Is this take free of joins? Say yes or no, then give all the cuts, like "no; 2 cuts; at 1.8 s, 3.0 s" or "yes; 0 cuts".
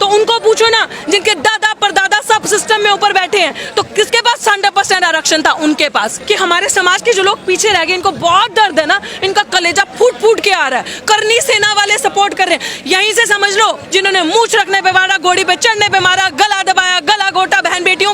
no; 2 cuts; at 6.2 s, 13.8 s